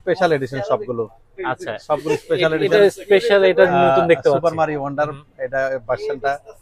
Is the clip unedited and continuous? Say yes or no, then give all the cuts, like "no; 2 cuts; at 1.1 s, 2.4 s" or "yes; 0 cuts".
yes; 0 cuts